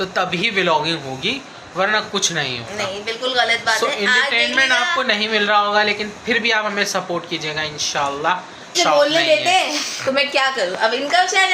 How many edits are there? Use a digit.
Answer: 1